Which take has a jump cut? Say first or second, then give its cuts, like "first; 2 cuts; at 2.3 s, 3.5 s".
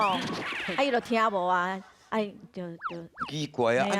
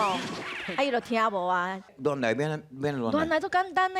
second; 1 cut; at 1.9 s